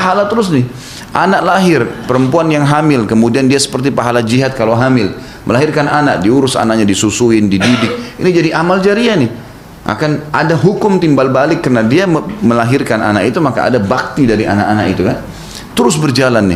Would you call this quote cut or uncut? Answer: uncut